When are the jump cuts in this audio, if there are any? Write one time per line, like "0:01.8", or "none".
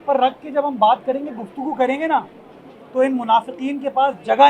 none